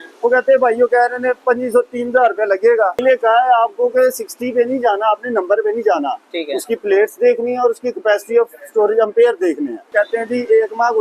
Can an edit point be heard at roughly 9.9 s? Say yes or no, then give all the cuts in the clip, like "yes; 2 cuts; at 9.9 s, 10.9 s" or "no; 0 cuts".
yes; 2 cuts; at 3.0 s, 9.9 s